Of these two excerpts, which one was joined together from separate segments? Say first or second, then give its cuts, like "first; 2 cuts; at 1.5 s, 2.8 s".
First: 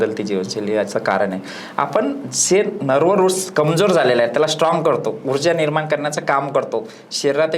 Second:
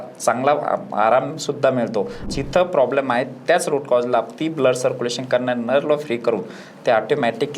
second; 1 cut; at 2.3 s